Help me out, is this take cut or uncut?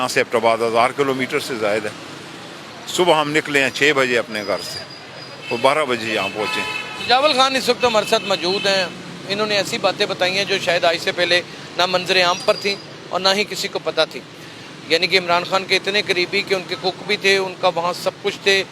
uncut